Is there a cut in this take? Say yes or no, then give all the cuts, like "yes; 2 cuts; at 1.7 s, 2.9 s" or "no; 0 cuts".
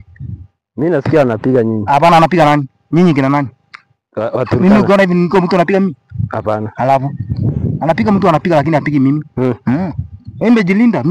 no; 0 cuts